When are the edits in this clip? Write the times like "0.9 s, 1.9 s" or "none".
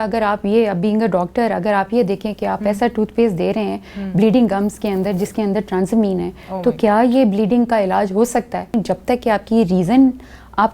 8.7 s